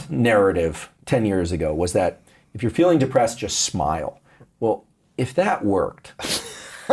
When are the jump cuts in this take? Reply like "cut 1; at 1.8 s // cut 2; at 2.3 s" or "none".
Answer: cut 1; at 0.9 s